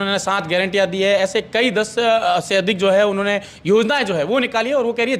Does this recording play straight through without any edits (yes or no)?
yes